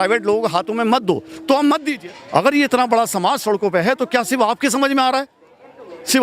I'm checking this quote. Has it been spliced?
yes; 1 cut; at 1.9 s

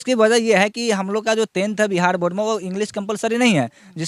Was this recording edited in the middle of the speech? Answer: no; 0 cuts

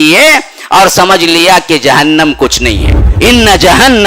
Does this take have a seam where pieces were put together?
yes; 1 cut; at 3.0 s

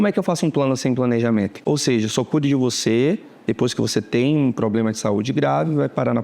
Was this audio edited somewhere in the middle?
yes; 1 cut; at 1.6 s

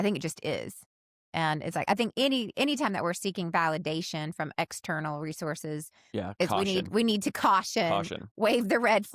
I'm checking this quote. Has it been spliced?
no; 0 cuts

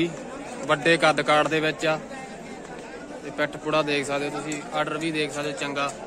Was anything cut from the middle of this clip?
no; 0 cuts

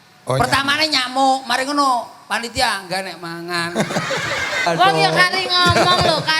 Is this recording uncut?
no; 1 cut; at 4.7 s

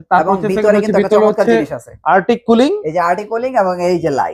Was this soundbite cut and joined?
no; 0 cuts

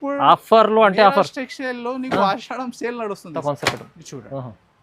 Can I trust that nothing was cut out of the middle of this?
no; 1 cut; at 3.3 s

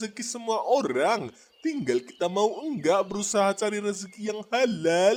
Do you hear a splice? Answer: no; 0 cuts

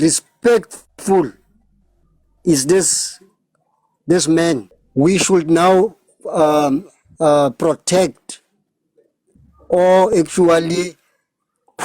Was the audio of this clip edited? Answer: yes; 1 cut; at 4.8 s

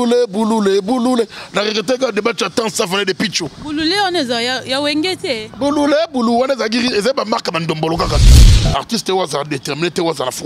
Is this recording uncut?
no; 1 cut; at 8.3 s

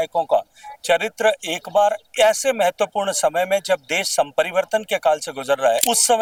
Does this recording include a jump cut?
no; 0 cuts

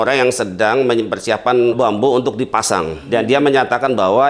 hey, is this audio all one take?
no; 2 cuts; at 1.8 s, 3.1 s

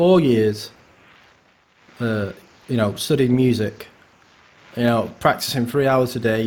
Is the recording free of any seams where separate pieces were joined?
yes; 0 cuts

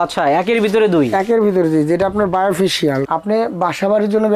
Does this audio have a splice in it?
yes; 1 cut; at 3.0 s

